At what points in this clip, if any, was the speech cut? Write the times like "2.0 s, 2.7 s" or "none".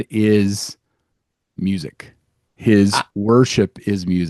none

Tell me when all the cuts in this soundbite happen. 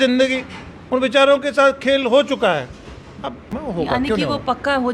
3.6 s

